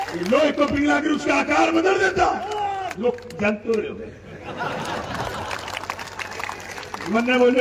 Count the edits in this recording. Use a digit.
0